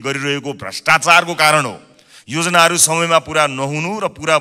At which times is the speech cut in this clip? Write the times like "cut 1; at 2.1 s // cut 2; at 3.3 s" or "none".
none